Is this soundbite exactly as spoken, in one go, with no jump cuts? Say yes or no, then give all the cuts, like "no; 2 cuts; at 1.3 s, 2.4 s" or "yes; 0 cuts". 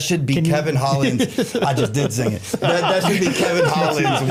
yes; 0 cuts